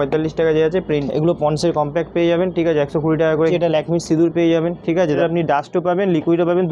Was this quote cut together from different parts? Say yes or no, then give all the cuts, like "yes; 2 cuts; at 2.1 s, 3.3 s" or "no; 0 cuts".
yes; 3 cuts; at 1.0 s, 3.5 s, 5.2 s